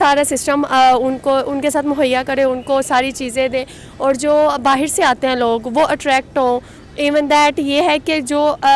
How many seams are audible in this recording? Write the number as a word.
zero